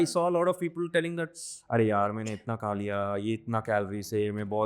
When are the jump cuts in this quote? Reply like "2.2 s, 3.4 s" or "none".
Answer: none